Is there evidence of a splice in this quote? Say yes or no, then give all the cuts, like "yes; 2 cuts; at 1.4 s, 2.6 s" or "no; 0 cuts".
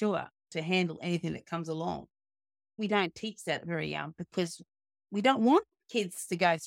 yes; 1 cut; at 2.8 s